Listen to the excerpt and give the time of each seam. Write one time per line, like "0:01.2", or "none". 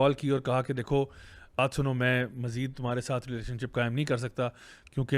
0:01.6